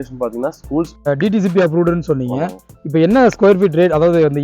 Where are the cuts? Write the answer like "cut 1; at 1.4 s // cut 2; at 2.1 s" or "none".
cut 1; at 1.0 s